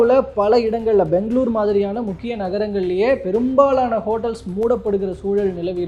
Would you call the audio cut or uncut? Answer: uncut